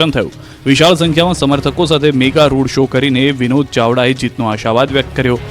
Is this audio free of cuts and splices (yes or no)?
no